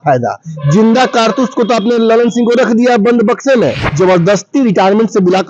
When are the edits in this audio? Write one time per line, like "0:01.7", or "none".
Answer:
0:03.8